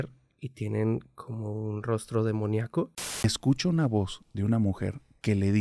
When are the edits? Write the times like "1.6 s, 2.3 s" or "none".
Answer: 3.2 s

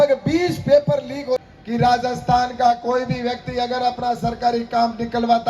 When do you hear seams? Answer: 1.4 s

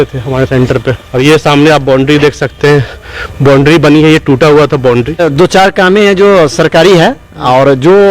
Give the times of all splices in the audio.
1.0 s, 5.2 s

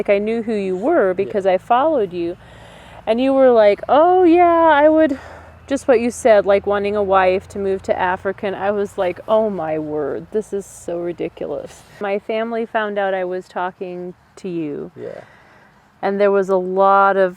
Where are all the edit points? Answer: 12.0 s

